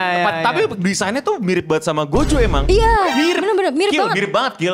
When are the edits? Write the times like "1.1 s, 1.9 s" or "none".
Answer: 2.6 s